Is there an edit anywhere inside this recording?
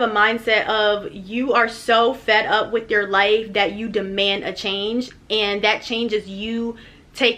no; 0 cuts

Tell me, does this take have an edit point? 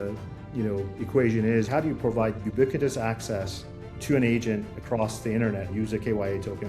yes; 3 cuts; at 1.7 s, 4.0 s, 5.7 s

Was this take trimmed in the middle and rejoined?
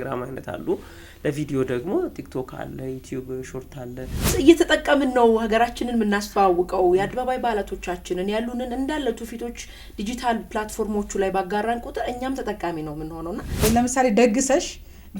yes; 2 cuts; at 4.3 s, 13.6 s

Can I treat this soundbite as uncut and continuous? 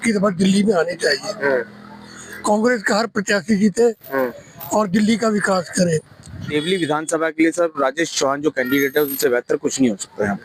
no; 1 cut; at 6.5 s

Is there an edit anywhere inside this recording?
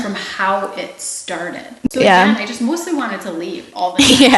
yes; 1 cut; at 1.9 s

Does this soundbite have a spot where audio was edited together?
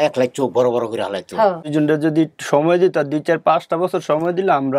yes; 1 cut; at 1.6 s

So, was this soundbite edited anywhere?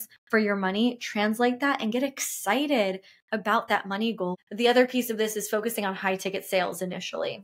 yes; 1 cut; at 4.4 s

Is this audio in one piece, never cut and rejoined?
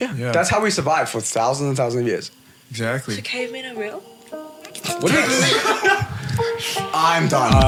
yes; 0 cuts

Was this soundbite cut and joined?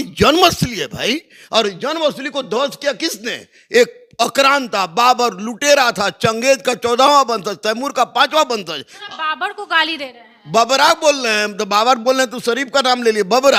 no; 0 cuts

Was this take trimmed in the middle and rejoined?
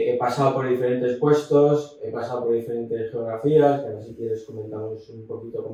no; 0 cuts

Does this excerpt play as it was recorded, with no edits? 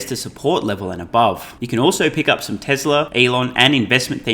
no; 2 cuts; at 1.5 s, 3.1 s

